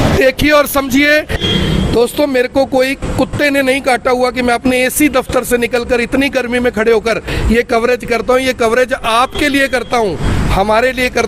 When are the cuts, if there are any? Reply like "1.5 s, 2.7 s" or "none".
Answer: 1.4 s